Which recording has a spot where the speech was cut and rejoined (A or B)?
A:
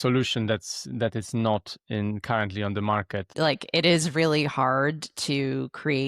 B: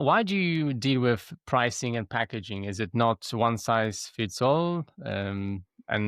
A